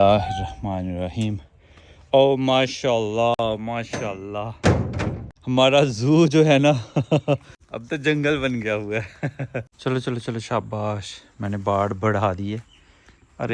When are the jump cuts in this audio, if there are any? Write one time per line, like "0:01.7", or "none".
0:05.3
0:07.5
0:09.7